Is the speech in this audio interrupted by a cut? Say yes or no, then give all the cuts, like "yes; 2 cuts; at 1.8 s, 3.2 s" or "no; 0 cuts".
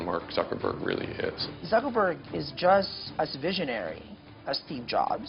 yes; 2 cuts; at 1.5 s, 3.0 s